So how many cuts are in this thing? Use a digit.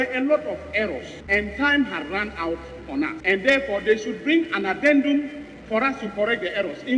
2